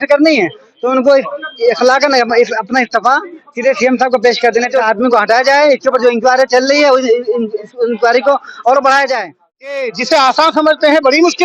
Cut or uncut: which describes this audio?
cut